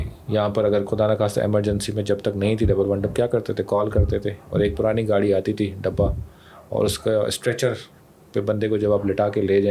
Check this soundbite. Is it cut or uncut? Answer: uncut